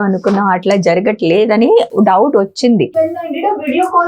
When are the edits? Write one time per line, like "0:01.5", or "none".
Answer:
0:02.9